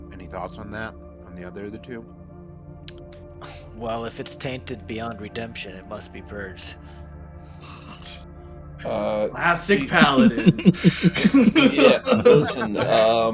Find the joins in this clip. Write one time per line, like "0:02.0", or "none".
none